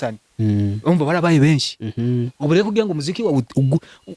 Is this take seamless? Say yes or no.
yes